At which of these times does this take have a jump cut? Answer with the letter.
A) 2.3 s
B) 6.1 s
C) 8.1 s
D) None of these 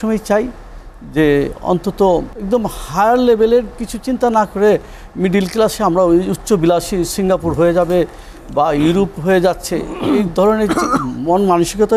A